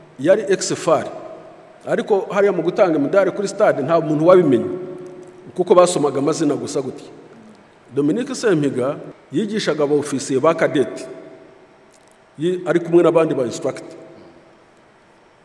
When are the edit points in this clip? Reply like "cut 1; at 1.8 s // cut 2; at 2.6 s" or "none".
cut 1; at 9.1 s